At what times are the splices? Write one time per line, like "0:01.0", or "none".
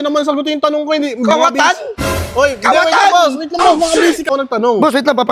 0:04.3